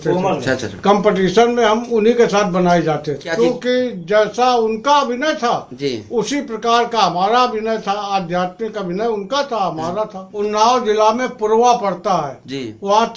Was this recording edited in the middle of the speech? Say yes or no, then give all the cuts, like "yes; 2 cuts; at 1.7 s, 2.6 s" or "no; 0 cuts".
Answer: yes; 2 cuts; at 3.2 s, 10.2 s